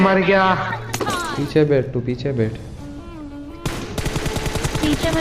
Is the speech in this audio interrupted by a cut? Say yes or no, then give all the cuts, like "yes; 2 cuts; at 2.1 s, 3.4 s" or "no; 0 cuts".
no; 0 cuts